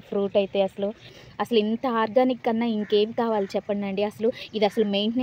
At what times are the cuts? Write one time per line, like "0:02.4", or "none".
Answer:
0:01.2